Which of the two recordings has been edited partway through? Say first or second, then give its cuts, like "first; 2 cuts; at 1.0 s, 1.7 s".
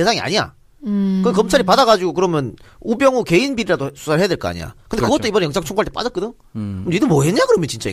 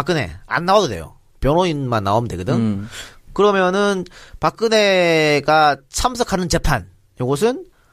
first; 1 cut; at 2.2 s